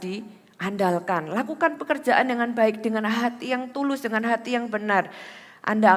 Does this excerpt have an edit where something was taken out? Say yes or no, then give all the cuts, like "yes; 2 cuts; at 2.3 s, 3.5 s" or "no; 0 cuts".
no; 0 cuts